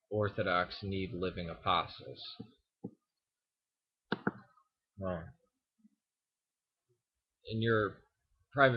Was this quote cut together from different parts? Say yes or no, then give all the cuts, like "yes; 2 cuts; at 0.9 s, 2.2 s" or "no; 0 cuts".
no; 0 cuts